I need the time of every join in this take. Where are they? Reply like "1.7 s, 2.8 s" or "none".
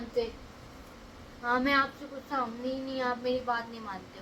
none